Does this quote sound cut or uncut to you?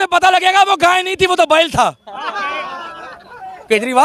uncut